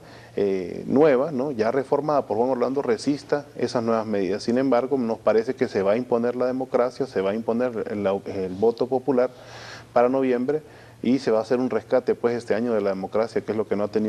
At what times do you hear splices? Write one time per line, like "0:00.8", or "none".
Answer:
0:07.0